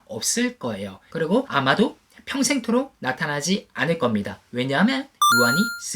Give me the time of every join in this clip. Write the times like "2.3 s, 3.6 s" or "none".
1.3 s